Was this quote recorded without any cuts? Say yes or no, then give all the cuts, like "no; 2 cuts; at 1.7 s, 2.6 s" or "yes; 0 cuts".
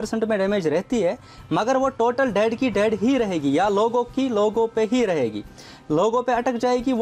yes; 0 cuts